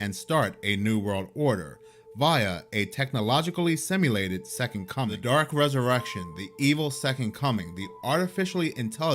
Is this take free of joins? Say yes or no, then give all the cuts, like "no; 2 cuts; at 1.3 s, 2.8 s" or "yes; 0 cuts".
no; 1 cut; at 5.2 s